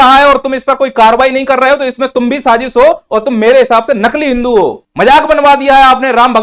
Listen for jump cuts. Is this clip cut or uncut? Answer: cut